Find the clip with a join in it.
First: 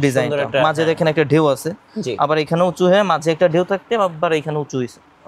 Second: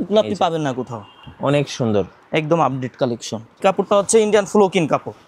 second; 1 cut; at 3.6 s

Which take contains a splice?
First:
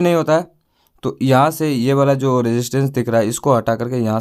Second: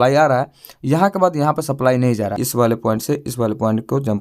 second; 1 cut; at 2.4 s

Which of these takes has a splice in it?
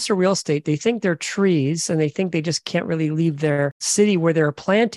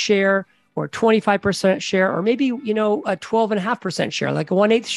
first; 1 cut; at 3.8 s

